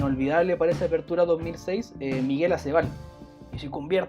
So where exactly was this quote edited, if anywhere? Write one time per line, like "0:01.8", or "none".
none